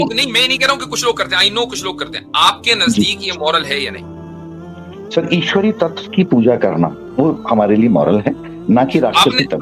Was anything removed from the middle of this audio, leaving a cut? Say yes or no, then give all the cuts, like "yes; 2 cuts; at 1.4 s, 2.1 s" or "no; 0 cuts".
no; 0 cuts